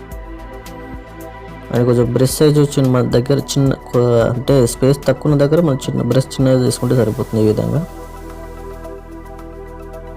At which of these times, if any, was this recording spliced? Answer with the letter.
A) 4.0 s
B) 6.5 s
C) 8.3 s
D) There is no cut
C